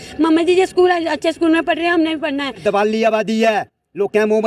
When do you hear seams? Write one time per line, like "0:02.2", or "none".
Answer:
0:02.6